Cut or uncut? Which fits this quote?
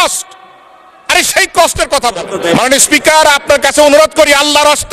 cut